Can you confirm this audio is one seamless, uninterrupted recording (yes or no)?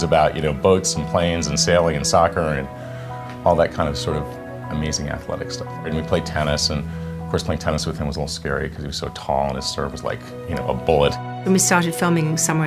no